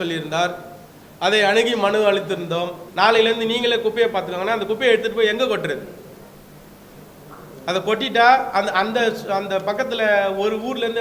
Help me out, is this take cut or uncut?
cut